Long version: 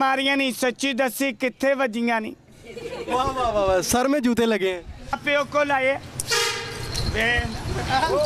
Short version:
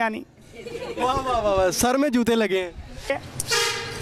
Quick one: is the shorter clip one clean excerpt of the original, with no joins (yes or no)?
no